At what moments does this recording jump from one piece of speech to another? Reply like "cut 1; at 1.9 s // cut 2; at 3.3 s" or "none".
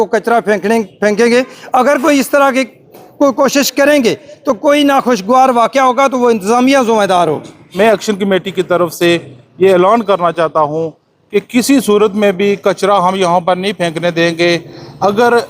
cut 1; at 7.7 s